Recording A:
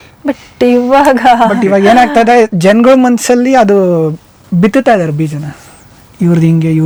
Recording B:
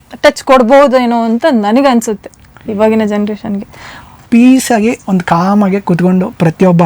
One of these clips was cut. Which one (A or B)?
B